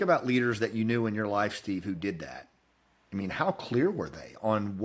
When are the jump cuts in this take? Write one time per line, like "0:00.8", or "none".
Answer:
none